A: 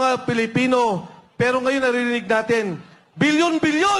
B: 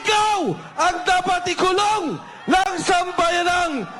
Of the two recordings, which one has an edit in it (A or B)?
B